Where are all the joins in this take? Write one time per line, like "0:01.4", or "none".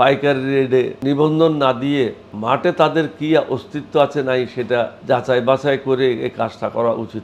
0:00.9
0:02.3
0:05.0